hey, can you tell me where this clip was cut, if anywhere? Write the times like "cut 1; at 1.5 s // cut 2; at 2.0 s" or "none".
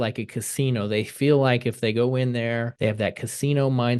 cut 1; at 2.7 s